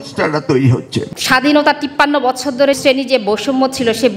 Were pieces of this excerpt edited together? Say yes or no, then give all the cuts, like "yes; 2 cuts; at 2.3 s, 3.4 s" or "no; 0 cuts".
yes; 2 cuts; at 1.1 s, 2.8 s